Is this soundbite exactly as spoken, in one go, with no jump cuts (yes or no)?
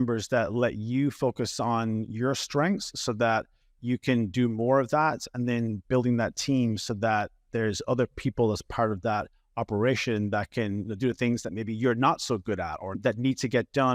no